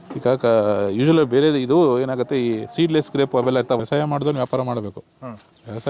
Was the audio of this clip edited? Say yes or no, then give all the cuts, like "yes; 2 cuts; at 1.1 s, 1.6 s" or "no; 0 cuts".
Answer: yes; 1 cut; at 3.8 s